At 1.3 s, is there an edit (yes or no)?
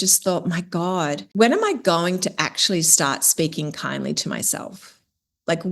yes